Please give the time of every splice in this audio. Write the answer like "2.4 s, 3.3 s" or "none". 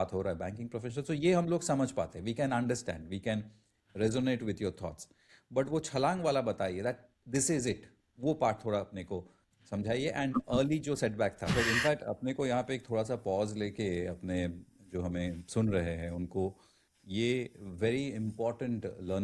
11.5 s